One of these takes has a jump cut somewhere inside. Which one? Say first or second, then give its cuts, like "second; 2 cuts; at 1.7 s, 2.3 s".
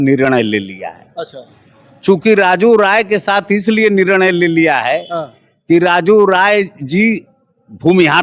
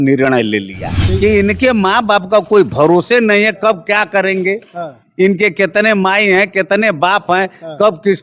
second; 1 cut; at 1.0 s